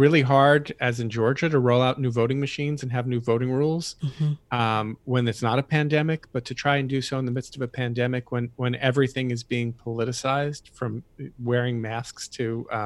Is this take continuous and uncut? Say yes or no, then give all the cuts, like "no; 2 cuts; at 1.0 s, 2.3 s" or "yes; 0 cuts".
yes; 0 cuts